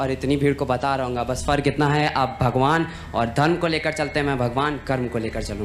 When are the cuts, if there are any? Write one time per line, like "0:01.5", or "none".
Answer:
none